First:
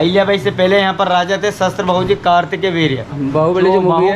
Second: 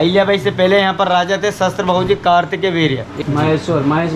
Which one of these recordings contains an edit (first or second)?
first